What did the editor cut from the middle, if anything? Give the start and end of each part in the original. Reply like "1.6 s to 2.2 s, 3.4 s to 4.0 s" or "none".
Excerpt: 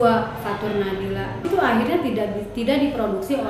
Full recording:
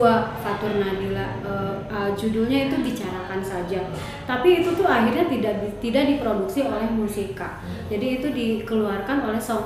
1.5 s to 4.7 s